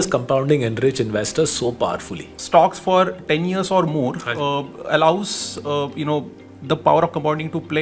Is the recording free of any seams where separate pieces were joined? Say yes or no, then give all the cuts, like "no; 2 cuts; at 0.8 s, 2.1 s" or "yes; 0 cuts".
no; 1 cut; at 2.3 s